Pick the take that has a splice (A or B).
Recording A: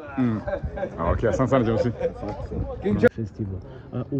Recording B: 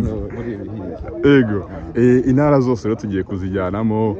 A